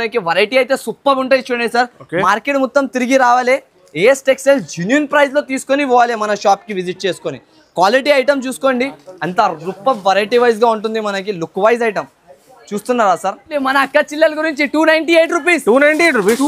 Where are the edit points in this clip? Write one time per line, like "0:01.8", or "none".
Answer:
0:13.6